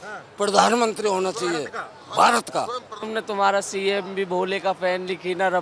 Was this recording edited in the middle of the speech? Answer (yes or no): yes